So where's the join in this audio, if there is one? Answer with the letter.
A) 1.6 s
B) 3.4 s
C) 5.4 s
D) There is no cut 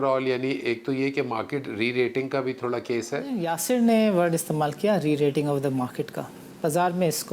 B